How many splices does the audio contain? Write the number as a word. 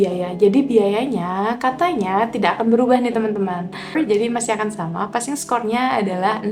one